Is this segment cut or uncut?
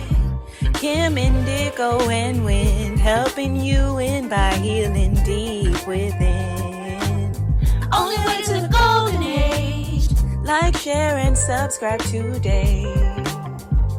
uncut